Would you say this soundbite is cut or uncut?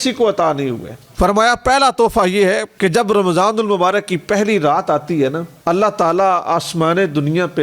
cut